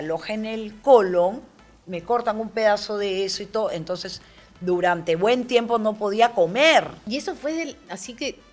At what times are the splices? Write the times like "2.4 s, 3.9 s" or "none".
7.0 s